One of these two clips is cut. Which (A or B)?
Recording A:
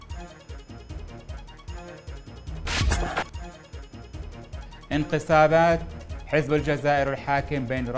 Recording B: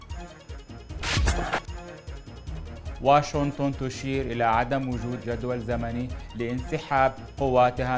B